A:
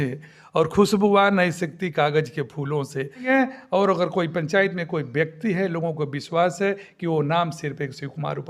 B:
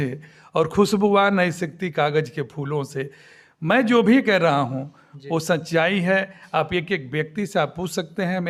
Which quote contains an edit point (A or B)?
A